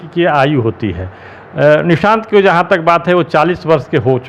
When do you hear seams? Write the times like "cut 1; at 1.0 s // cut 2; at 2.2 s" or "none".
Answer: none